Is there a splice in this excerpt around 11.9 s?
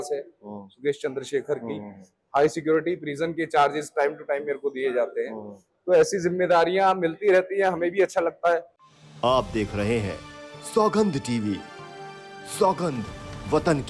no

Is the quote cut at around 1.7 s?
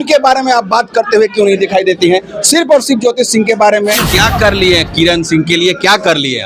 no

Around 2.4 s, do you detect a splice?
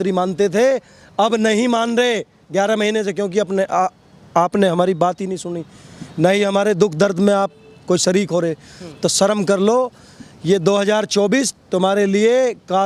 no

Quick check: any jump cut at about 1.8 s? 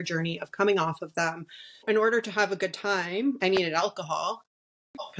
yes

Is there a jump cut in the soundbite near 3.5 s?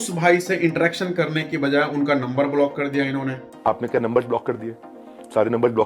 yes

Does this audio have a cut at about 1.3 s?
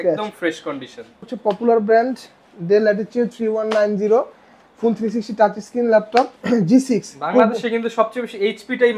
yes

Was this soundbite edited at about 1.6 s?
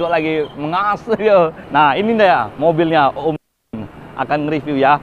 yes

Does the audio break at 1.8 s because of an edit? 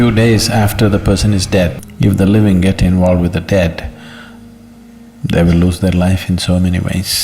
yes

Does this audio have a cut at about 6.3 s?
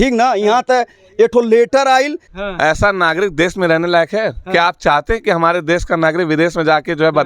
no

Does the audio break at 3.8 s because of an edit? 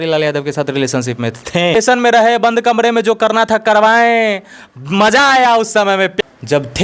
no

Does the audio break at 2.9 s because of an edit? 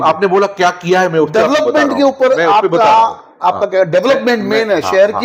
no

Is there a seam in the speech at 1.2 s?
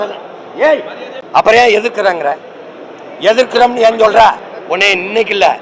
yes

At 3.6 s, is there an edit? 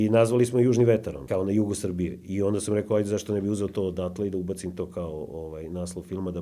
no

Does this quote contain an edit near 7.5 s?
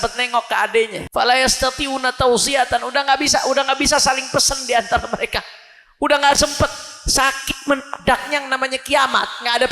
no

